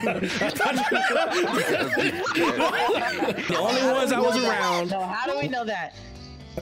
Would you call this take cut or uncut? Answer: cut